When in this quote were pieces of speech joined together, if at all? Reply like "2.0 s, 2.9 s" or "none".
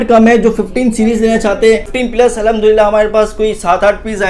1.9 s